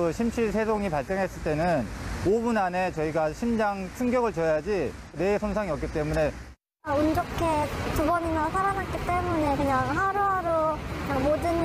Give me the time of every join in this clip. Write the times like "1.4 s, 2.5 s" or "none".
none